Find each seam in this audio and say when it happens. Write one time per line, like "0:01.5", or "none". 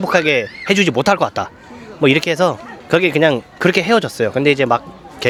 none

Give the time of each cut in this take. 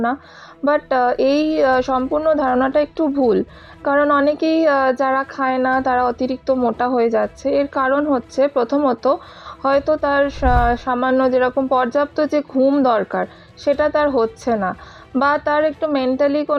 none

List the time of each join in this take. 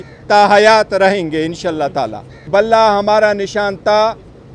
0:02.4

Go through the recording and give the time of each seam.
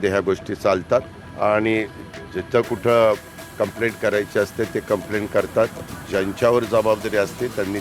0:01.2

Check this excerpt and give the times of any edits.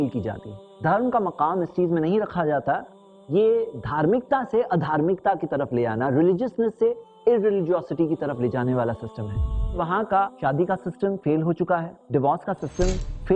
0:09.8

